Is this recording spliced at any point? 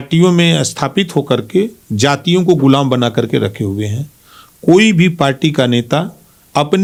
no; 0 cuts

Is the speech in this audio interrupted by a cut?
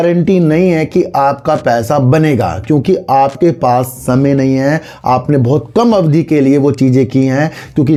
no; 0 cuts

